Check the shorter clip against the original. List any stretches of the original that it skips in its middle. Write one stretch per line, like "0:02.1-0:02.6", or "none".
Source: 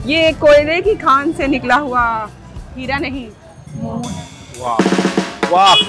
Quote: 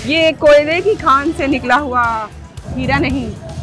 none